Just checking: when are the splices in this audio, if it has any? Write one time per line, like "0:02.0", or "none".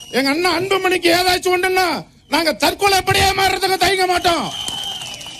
none